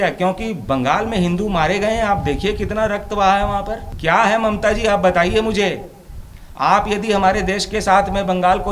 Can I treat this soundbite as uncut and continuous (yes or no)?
no